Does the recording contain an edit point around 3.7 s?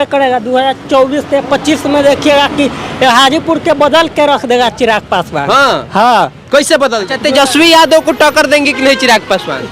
no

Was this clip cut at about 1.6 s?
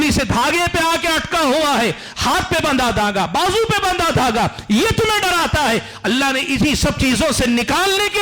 no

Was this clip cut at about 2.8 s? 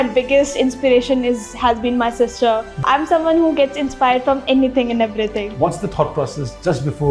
yes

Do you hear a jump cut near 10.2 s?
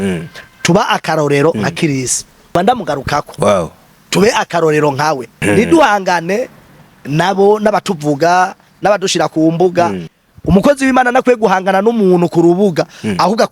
yes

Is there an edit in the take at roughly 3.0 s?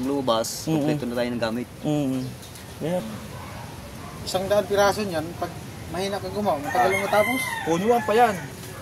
yes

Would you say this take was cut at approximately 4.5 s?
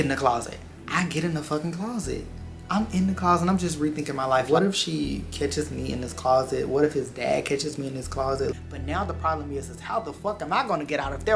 yes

